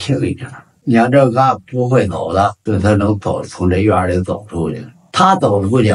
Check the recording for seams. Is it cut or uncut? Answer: cut